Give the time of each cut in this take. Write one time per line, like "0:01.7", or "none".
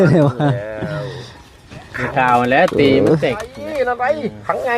0:03.7